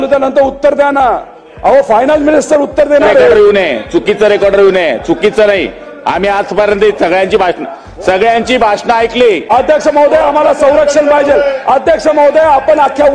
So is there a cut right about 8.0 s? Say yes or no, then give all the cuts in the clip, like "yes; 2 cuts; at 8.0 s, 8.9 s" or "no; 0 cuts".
no; 1 cut; at 9.4 s